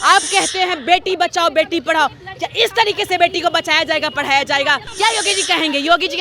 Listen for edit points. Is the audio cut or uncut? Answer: cut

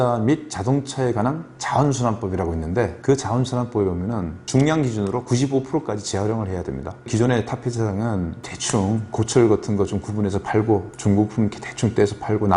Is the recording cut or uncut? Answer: uncut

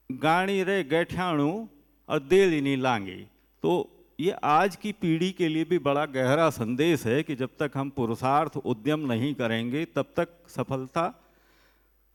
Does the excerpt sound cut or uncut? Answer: uncut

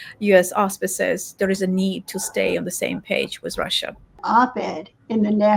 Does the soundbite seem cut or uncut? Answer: cut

